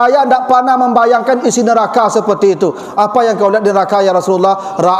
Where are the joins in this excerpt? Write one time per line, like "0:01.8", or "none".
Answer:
none